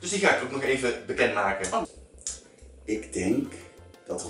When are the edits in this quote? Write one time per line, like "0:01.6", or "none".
0:02.0